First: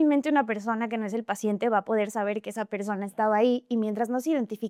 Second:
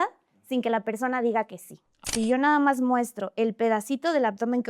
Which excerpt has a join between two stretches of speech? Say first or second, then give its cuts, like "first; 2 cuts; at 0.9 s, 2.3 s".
second; 1 cut; at 2.0 s